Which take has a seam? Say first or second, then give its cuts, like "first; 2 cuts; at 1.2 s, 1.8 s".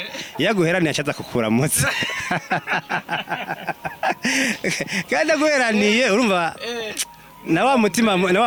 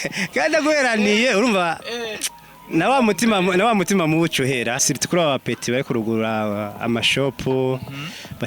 second; 1 cut; at 4.8 s